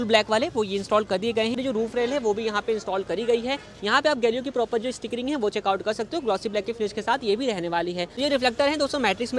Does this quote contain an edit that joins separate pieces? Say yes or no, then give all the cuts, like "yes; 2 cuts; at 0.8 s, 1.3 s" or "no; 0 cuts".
yes; 2 cuts; at 1.6 s, 8.2 s